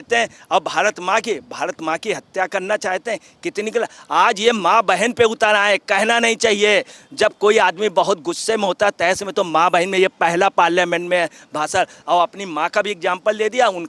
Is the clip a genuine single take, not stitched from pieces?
yes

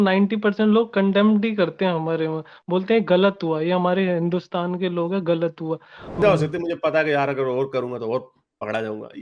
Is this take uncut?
no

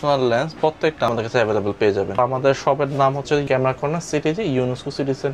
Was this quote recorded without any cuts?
no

